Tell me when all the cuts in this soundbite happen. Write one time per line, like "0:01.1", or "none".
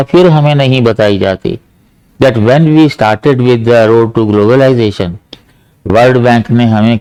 none